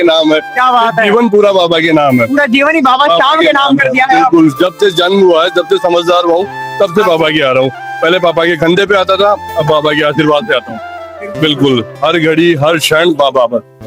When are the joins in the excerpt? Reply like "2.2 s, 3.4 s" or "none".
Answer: none